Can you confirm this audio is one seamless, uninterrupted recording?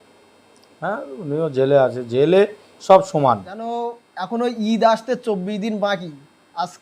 no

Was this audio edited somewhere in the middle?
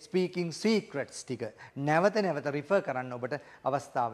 no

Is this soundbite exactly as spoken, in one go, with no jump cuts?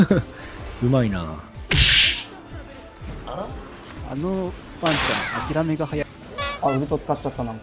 no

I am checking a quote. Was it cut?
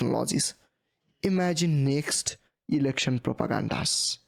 no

